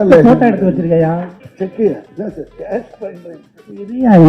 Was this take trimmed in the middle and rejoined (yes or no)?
yes